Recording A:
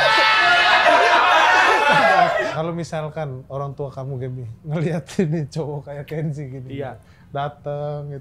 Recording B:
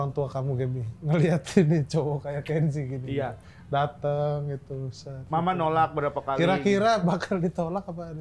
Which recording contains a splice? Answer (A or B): A